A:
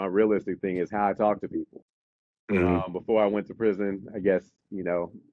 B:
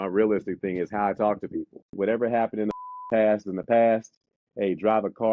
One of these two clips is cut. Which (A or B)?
B